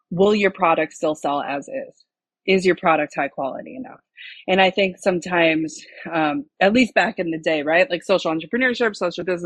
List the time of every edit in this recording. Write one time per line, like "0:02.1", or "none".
none